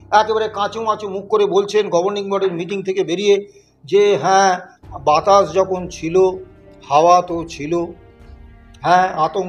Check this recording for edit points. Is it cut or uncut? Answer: uncut